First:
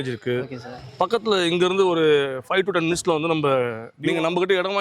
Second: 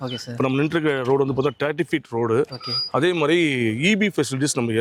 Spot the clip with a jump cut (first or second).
first